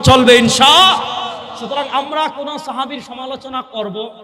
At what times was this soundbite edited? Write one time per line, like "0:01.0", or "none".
none

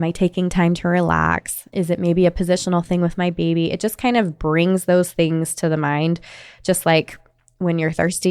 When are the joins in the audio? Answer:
0:01.6

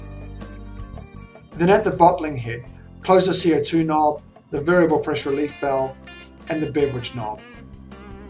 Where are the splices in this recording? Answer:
0:01.5
0:07.4

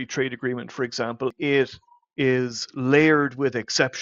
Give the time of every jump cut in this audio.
0:01.3

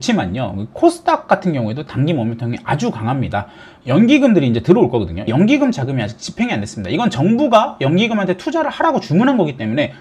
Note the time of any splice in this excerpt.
none

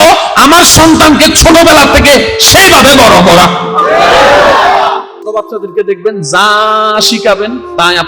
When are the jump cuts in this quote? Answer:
0:05.0

